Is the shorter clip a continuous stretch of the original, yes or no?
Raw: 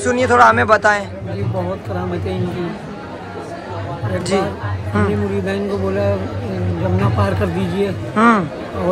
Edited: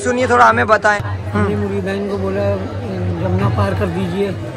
no